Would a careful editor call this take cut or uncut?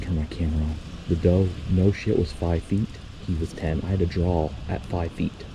uncut